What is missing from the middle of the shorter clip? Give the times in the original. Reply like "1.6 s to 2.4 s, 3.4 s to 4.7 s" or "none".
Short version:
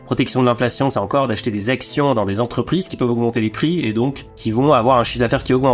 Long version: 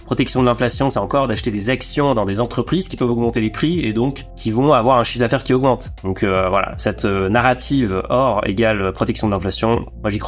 none